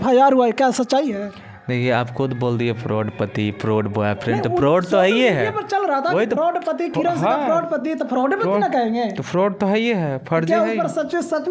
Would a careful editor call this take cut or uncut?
uncut